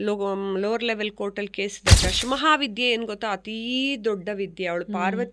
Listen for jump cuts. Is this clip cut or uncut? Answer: cut